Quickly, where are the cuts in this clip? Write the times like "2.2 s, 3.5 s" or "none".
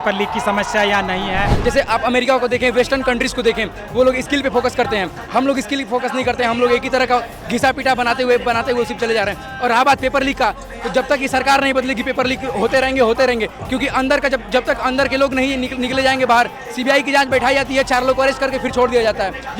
1.5 s